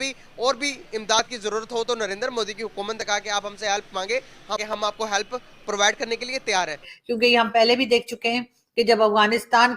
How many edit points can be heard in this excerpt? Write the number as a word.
one